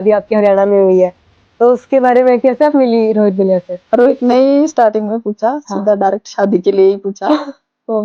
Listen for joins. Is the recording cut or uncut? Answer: uncut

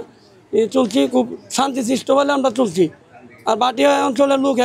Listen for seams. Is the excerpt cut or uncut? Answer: uncut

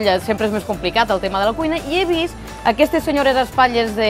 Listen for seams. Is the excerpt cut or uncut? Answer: uncut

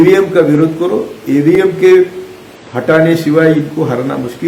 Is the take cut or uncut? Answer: uncut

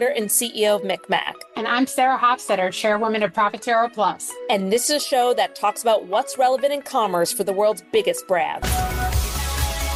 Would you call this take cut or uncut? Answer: uncut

